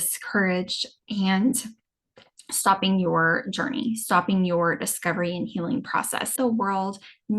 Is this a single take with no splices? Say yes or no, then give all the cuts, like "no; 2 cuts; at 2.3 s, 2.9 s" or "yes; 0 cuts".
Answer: no; 1 cut; at 6.3 s